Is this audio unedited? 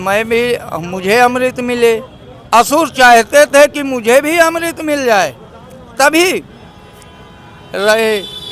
yes; 0 cuts

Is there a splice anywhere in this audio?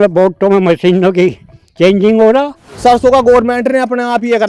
yes; 1 cut; at 2.7 s

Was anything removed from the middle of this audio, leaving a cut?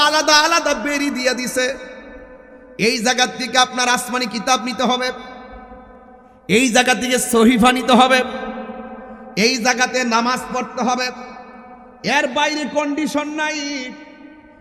no; 0 cuts

